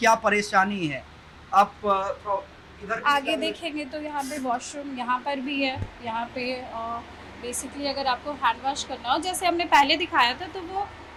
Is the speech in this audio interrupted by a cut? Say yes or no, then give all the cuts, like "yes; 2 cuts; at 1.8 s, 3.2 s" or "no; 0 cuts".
no; 0 cuts